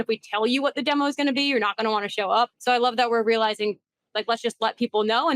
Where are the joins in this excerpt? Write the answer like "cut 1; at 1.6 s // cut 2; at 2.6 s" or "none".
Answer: cut 1; at 2.6 s